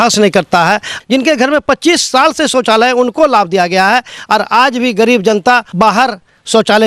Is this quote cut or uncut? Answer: cut